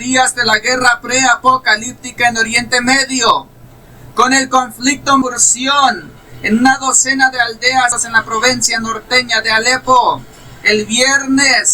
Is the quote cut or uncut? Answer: cut